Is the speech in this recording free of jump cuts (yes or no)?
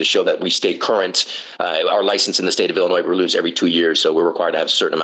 yes